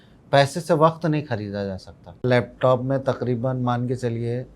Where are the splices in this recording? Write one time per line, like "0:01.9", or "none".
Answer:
0:02.2